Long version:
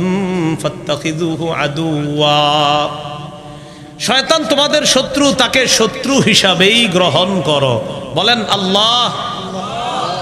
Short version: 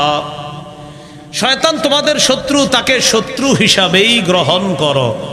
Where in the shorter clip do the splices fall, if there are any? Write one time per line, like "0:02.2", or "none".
none